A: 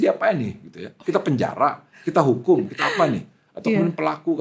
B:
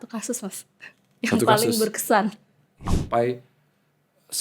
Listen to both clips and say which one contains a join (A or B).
B